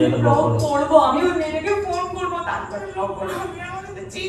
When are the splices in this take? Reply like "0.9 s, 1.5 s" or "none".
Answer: none